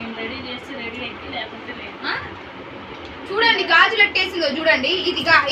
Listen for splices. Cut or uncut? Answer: uncut